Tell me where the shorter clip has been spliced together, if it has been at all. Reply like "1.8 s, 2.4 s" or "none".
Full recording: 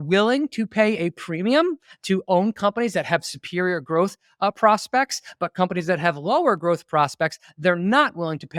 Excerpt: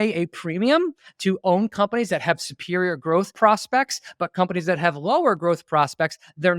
3.3 s